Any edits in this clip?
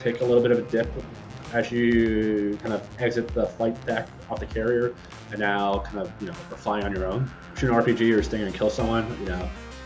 yes; 1 cut; at 7.5 s

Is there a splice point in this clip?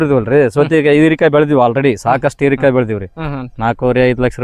no; 0 cuts

